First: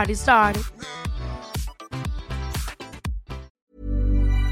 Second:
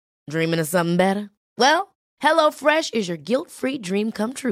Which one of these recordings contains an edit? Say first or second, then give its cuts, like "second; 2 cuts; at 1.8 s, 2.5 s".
first; 1 cut; at 3.6 s